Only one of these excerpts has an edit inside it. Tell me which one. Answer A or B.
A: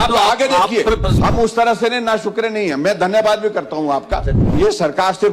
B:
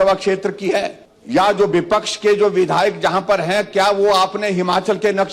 A